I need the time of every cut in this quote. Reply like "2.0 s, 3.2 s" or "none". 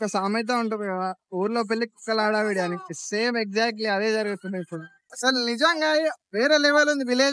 none